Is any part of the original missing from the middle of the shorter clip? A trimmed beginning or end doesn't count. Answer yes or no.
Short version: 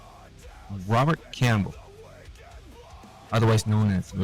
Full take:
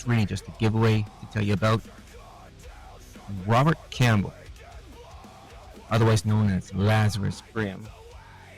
no